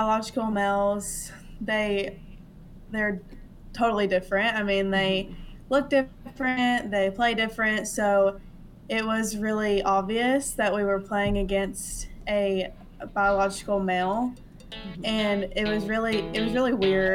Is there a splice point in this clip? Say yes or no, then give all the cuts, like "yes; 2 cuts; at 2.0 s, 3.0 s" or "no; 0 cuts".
no; 0 cuts